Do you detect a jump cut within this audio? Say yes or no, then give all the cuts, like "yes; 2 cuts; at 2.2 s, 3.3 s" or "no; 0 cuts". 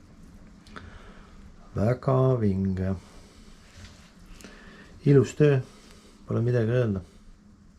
no; 0 cuts